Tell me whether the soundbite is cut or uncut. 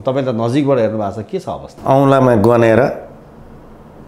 uncut